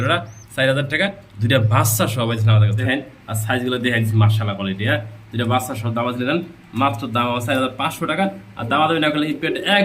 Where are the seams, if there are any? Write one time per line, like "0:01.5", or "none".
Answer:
0:02.8